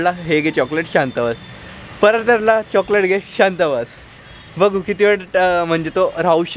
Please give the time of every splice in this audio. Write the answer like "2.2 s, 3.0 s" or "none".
none